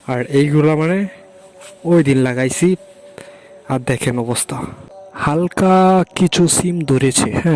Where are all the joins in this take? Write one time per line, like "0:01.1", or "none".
0:04.9